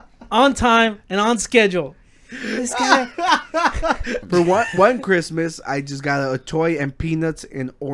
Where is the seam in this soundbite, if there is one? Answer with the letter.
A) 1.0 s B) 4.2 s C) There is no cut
B